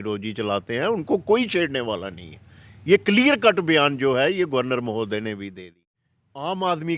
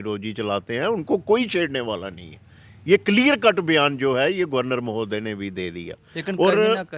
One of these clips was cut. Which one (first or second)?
first